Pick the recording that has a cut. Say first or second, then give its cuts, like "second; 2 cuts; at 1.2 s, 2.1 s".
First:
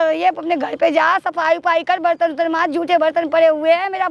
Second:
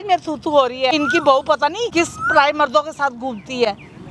second; 2 cuts; at 0.9 s, 1.9 s